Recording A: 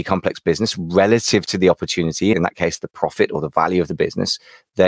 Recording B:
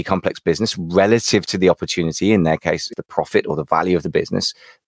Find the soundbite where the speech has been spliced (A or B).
A